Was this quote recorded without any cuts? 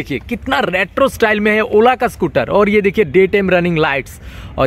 yes; 0 cuts

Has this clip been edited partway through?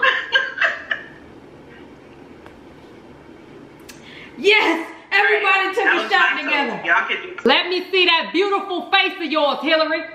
yes; 1 cut; at 7.5 s

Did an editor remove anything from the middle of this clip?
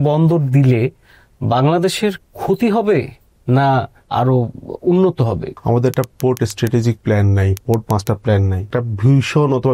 yes; 4 cuts; at 4.0 s, 5.5 s, 7.6 s, 8.6 s

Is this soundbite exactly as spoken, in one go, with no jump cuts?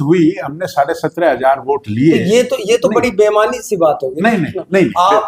yes; 0 cuts

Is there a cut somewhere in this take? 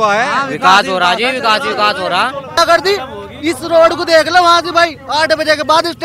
yes; 1 cut; at 2.6 s

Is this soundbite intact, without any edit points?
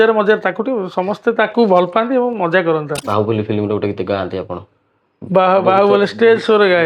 no; 1 cut; at 3.1 s

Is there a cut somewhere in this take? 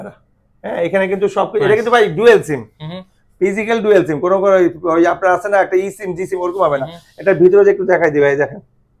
no; 0 cuts

